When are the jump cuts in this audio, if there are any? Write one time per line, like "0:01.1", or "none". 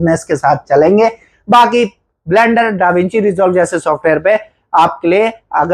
none